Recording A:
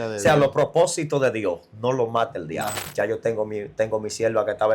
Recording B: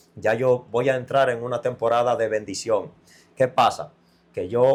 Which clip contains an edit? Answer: A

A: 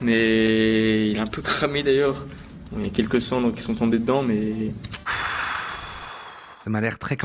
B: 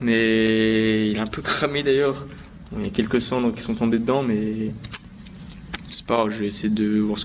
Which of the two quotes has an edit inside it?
A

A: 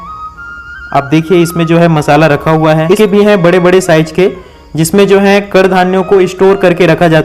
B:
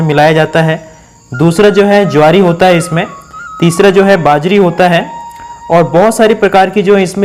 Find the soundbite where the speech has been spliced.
A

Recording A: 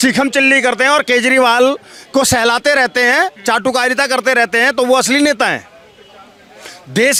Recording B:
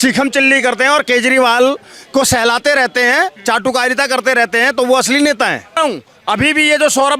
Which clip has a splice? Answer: B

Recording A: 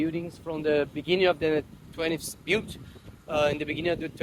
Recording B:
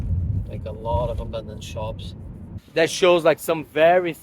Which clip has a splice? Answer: B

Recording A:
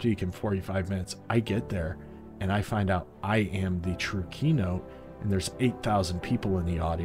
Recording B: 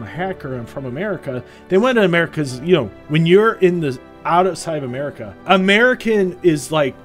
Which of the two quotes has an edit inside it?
B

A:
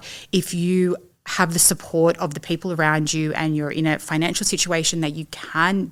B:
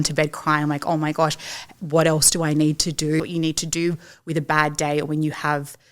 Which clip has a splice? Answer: B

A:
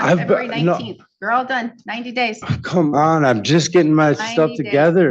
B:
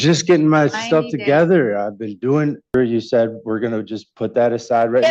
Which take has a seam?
B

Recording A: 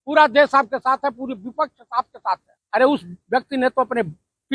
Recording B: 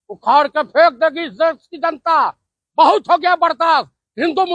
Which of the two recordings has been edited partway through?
A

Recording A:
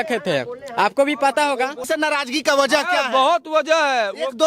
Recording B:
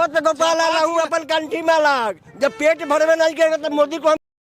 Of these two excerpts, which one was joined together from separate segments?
A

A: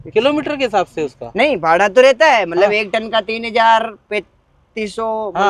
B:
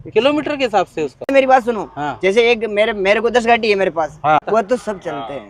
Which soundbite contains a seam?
B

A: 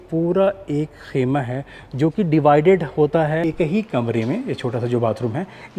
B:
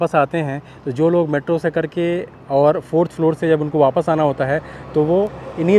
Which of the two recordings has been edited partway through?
A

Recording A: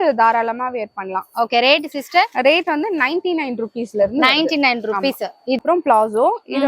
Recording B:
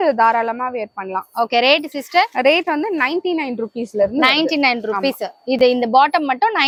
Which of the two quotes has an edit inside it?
A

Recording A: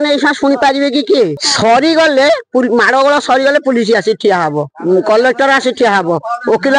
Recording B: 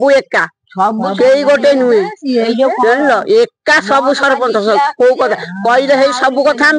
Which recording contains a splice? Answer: A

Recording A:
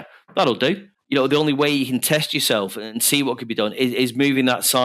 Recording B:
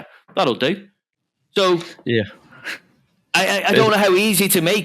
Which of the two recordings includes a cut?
A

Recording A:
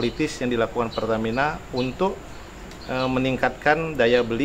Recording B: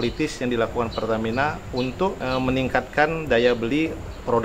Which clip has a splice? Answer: B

